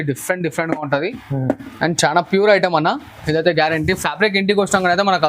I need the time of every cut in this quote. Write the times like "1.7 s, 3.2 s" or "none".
none